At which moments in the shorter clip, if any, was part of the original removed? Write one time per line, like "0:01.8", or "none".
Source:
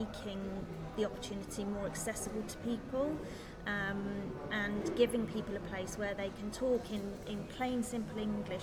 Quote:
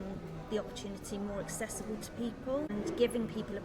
0:02.7